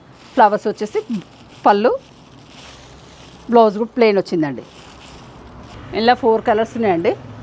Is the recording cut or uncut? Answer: uncut